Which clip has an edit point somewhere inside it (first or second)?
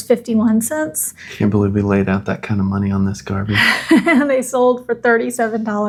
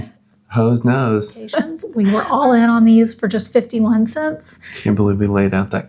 second